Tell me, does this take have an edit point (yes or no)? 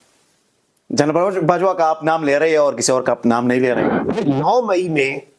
yes